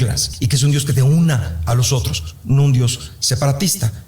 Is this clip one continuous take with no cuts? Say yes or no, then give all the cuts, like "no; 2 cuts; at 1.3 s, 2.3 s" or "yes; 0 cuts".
no; 1 cut; at 1.5 s